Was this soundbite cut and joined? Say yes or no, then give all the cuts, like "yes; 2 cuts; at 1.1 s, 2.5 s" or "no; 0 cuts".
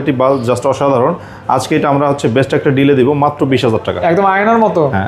no; 0 cuts